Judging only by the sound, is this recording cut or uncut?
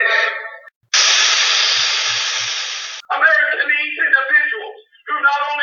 cut